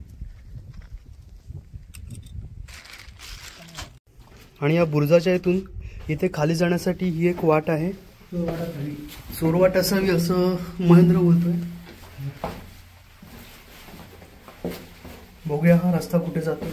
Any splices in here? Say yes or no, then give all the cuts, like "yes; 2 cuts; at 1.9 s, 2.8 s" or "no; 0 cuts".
yes; 1 cut; at 4.0 s